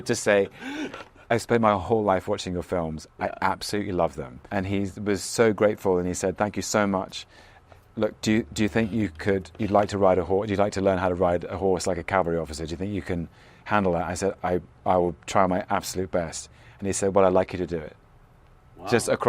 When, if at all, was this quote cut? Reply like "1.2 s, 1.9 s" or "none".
4.4 s, 7.5 s